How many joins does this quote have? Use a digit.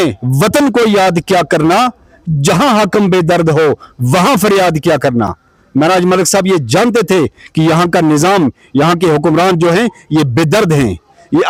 0